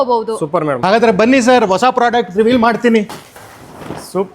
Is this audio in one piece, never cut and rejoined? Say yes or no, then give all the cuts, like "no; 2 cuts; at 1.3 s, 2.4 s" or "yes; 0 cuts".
no; 2 cuts; at 0.8 s, 3.2 s